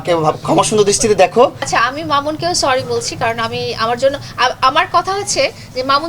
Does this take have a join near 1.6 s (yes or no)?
yes